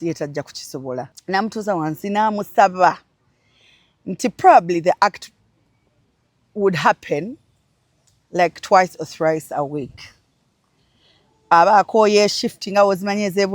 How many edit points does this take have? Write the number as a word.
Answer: one